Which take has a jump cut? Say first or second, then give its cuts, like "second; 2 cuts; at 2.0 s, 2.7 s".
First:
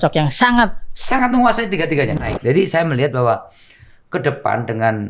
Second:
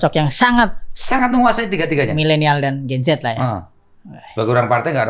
first; 1 cut; at 2.2 s